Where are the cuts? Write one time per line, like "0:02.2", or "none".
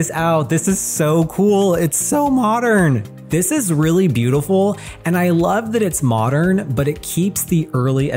0:03.1